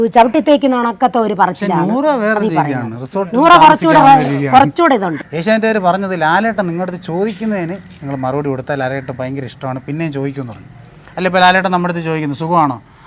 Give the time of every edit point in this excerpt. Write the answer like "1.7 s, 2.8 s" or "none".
5.2 s